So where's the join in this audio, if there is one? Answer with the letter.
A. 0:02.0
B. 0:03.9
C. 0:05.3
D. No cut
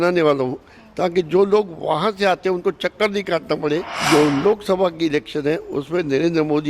B